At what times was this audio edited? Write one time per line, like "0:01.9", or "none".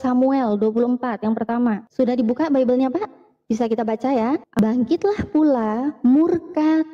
0:04.6